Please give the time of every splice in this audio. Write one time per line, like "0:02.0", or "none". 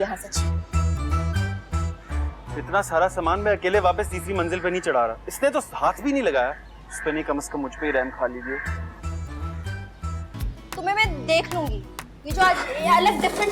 0:10.4